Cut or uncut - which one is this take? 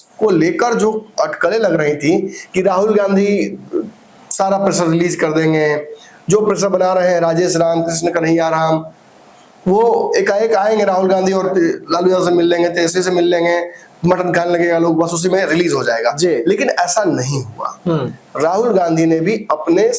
uncut